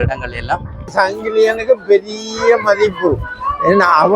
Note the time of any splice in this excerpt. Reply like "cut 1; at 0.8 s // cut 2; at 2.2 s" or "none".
cut 1; at 0.9 s